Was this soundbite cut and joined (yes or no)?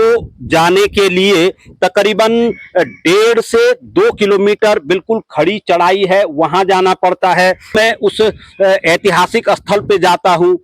yes